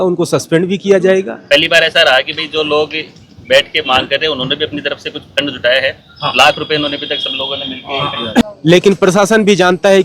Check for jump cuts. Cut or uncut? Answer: cut